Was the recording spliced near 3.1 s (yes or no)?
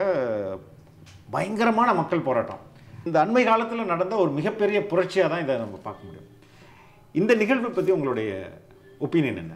yes